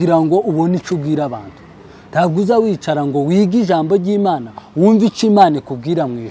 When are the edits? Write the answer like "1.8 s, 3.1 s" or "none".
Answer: none